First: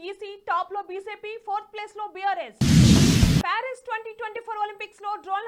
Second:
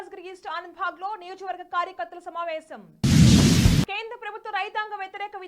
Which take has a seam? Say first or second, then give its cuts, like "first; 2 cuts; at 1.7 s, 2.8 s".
second; 2 cuts; at 2.9 s, 3.8 s